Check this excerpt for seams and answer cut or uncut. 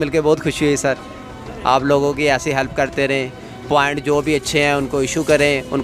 uncut